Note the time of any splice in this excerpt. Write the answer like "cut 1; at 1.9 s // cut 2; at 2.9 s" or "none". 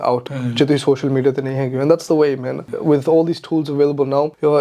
cut 1; at 2.6 s

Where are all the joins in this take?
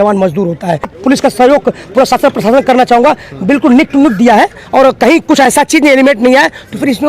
cut 1; at 0.9 s

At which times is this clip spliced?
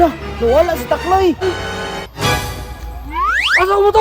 cut 1; at 1.4 s

